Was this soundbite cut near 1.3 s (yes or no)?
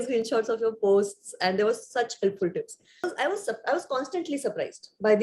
no